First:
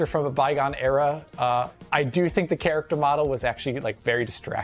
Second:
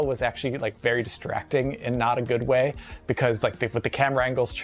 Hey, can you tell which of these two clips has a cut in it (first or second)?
second